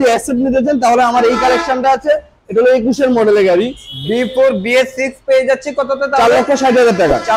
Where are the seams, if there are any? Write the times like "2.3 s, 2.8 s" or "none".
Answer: 3.9 s

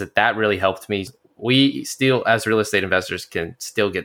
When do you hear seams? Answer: 1.1 s

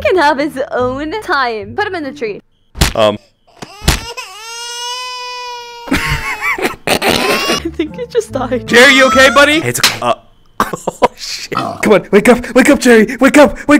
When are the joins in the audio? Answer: 9.9 s

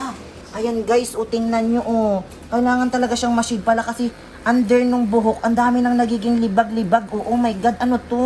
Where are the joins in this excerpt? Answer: none

